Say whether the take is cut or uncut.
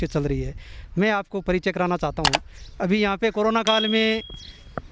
uncut